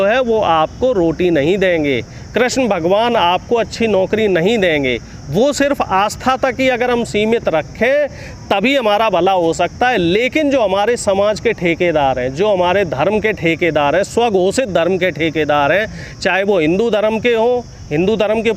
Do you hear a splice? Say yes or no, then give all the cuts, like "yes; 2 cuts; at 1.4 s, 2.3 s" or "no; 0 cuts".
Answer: no; 0 cuts